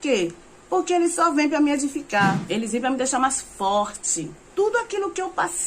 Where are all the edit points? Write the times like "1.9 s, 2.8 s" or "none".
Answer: 2.4 s, 4.4 s